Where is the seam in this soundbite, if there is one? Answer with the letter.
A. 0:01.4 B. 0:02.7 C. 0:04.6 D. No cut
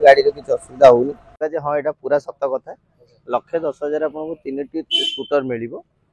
A